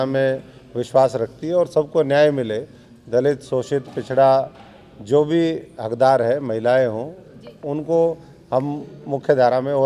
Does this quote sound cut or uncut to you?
uncut